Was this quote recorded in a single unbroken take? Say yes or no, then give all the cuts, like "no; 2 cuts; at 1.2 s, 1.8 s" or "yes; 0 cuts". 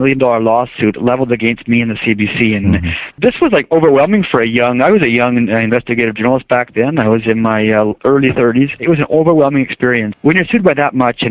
no; 2 cuts; at 3.2 s, 10.1 s